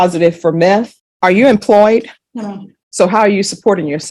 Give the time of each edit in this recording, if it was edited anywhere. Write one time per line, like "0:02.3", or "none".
0:01.0